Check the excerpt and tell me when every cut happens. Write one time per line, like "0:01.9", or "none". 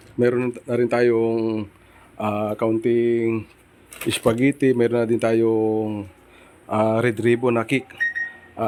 none